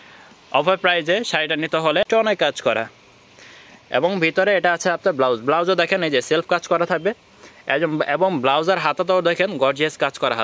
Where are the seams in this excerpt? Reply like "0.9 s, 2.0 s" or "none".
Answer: 2.1 s